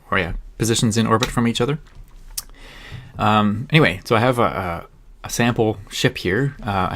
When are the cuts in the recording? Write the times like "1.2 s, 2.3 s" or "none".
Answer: 4.0 s